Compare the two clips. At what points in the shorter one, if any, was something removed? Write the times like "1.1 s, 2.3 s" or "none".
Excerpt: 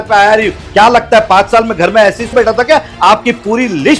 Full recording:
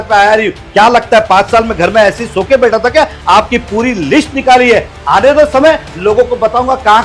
2.3 s

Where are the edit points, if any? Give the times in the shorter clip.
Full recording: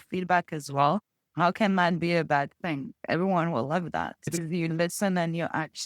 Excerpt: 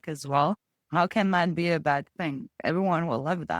none

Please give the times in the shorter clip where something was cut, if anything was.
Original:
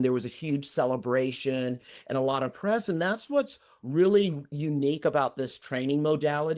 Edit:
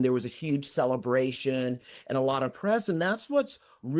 none

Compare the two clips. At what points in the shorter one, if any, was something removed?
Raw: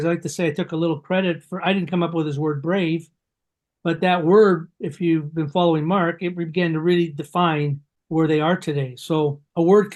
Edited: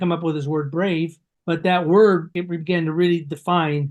1.3 s, 2.4 s

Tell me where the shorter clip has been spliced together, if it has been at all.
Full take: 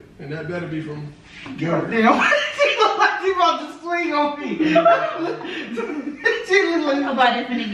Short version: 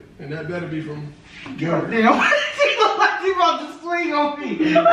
none

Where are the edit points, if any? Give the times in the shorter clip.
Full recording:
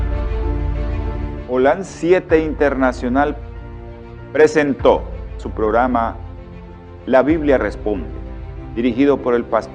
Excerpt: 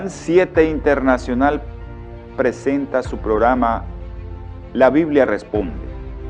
2.6 s

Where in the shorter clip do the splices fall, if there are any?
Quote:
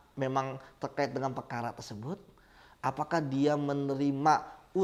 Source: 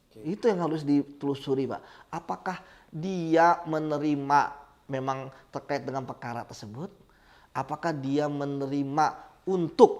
none

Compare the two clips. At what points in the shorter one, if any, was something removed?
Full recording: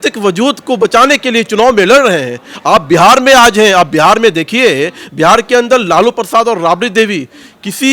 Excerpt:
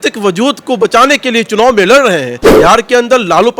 2.4 s

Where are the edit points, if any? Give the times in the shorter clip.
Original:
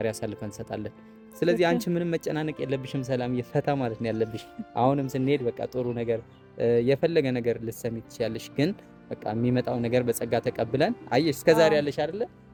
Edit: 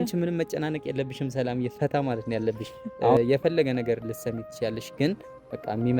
3.1 s

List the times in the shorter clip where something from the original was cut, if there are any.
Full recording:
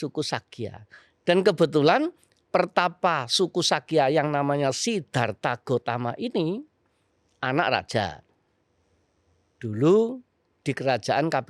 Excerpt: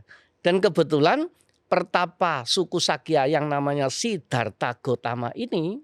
none

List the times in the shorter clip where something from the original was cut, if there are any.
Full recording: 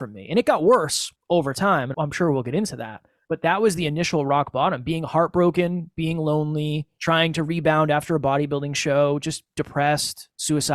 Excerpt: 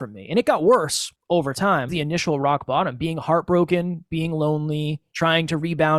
1.9 s

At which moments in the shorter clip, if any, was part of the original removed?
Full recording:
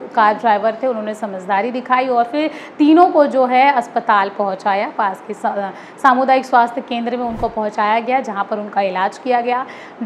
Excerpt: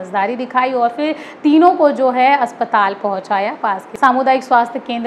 3.9 s

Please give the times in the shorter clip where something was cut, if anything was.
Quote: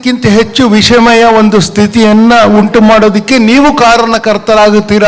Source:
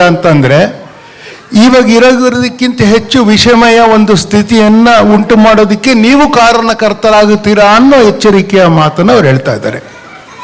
none

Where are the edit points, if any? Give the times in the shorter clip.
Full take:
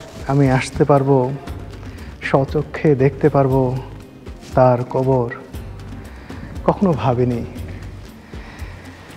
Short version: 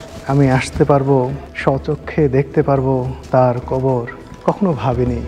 1.5 s, 3.2 s, 4.2 s

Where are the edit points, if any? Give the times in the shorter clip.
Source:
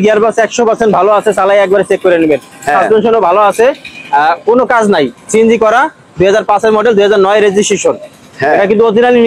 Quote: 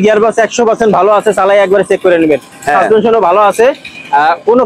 none

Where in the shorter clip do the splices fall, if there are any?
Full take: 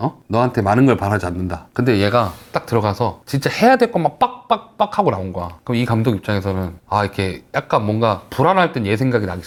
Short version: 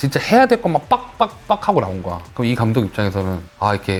none

